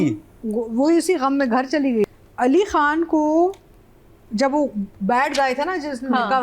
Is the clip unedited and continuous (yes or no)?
no